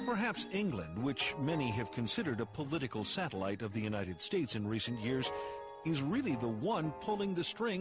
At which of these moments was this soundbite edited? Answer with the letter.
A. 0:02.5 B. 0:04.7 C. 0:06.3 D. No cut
A